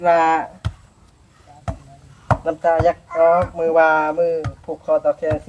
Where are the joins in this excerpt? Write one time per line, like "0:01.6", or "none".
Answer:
none

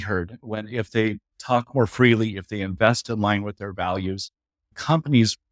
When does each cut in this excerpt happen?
0:01.3
0:04.7

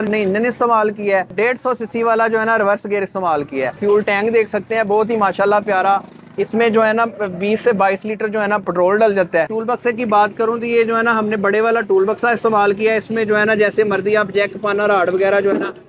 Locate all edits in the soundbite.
0:01.3
0:03.8
0:09.5

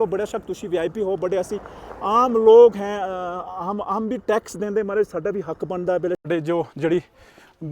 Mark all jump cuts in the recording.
0:06.2

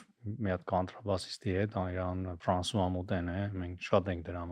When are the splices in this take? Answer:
0:02.3

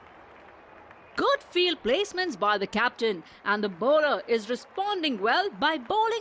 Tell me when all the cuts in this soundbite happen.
0:01.2

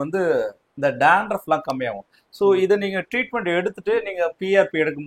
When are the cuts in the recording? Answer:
none

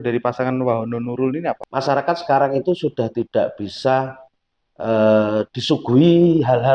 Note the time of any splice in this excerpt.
0:01.6

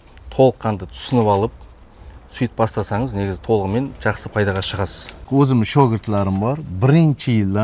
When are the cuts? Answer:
0:05.3

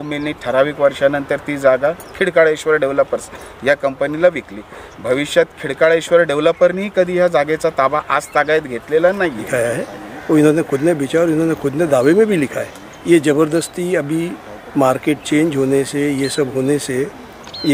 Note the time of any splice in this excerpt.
0:09.4

